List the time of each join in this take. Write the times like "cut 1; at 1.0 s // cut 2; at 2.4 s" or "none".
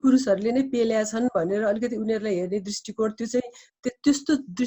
none

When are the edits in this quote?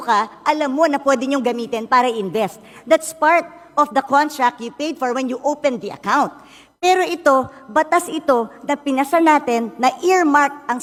none

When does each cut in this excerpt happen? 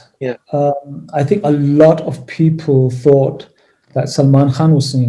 none

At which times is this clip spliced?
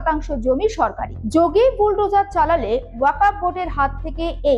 cut 1; at 1.1 s

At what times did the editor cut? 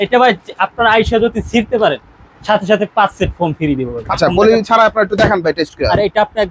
cut 1; at 4.0 s

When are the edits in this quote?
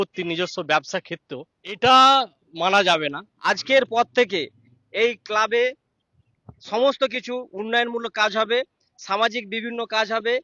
cut 1; at 1.8 s // cut 2; at 3.3 s

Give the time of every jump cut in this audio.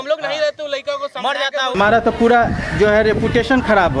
cut 1; at 1.8 s

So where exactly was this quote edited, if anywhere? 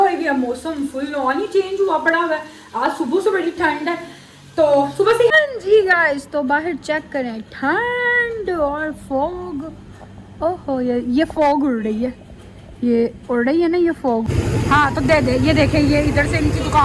cut 1; at 5.3 s // cut 2; at 14.3 s

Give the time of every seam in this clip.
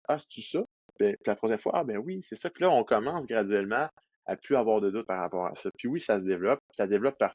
cut 1; at 5.1 s

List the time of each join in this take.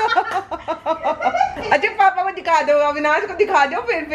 none

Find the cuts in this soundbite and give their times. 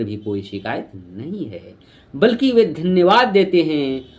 none

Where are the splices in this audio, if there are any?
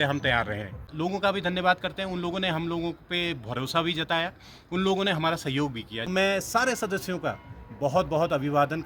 cut 1; at 1.1 s // cut 2; at 5.9 s

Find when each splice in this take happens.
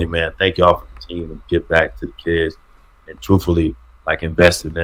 none

